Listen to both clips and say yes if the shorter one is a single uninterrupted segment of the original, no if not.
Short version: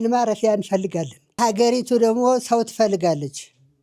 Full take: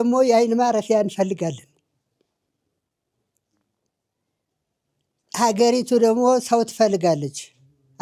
no